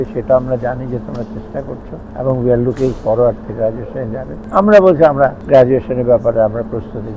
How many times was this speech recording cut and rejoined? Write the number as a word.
three